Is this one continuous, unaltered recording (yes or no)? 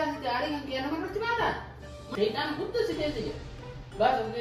no